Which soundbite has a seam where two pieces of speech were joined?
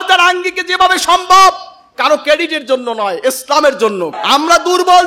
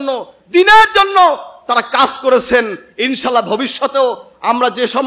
first; 1 cut; at 4.1 s

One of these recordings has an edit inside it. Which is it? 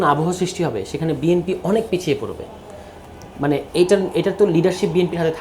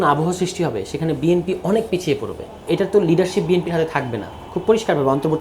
second; 1 cut; at 2.6 s

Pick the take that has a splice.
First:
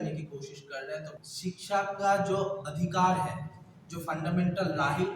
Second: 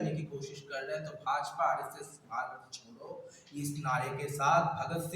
first; 1 cut; at 1.1 s

